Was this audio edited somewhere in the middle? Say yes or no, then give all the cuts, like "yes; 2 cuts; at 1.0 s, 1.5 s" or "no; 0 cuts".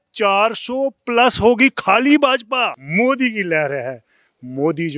yes; 1 cut; at 2.8 s